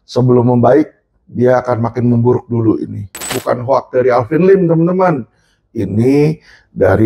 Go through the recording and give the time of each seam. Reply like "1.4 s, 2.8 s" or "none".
3.3 s